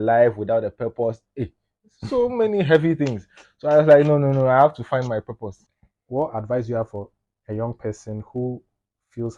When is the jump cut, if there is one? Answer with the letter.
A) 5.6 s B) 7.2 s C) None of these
A